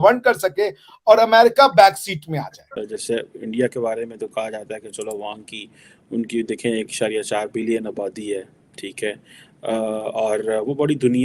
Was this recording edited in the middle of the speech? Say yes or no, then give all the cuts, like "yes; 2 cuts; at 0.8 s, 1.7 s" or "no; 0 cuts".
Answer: yes; 1 cut; at 2.8 s